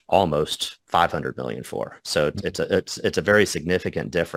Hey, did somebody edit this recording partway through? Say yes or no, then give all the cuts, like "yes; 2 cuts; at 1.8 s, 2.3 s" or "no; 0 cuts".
no; 0 cuts